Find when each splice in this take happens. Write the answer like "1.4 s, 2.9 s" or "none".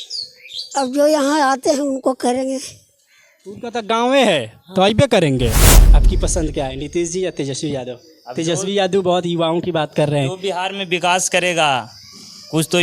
5.8 s